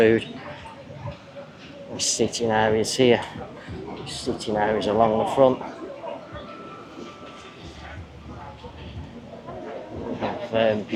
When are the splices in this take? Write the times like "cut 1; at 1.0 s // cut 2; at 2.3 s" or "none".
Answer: none